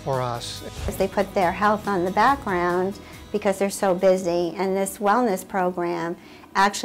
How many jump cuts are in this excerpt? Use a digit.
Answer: 1